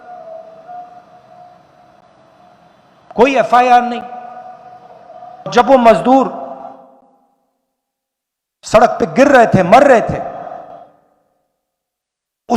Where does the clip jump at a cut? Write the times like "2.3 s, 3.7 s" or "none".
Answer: 5.5 s